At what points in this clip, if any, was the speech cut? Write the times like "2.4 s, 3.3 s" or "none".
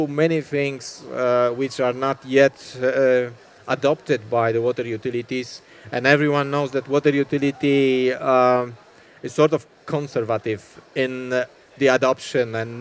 none